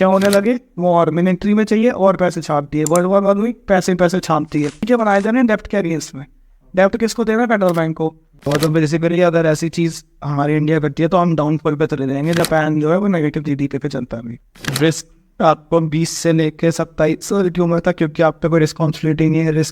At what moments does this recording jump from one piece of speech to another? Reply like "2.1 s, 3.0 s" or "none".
4.8 s, 8.3 s, 12.4 s, 14.7 s